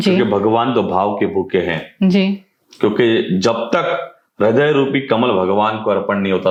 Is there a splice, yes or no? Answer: no